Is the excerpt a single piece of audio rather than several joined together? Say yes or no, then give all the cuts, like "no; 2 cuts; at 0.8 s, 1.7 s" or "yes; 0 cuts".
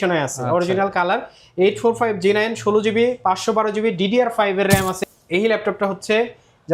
no; 1 cut; at 5.0 s